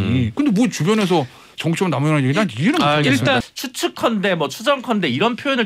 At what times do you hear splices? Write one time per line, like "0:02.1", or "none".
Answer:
0:03.4